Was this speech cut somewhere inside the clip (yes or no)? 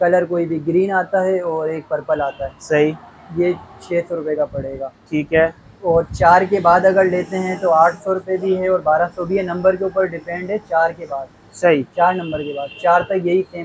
no